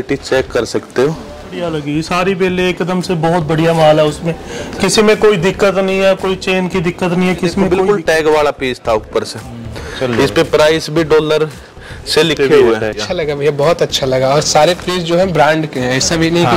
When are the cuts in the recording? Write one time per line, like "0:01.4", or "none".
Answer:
0:01.6
0:07.8
0:13.0